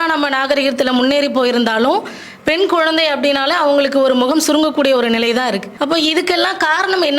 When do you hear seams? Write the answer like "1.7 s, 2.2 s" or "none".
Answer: 5.7 s